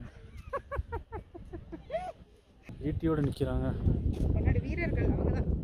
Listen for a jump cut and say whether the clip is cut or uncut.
cut